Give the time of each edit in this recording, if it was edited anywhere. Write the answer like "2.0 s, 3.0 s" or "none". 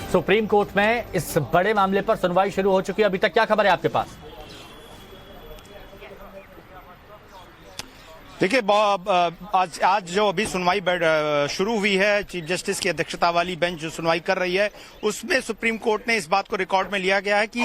2.8 s

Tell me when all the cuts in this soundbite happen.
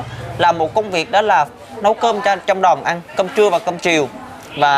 none

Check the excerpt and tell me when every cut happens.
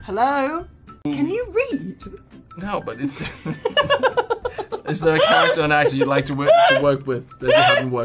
none

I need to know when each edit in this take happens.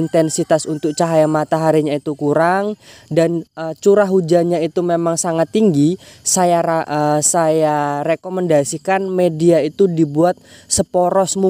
none

